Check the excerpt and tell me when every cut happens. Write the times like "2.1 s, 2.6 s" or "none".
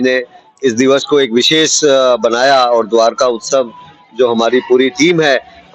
none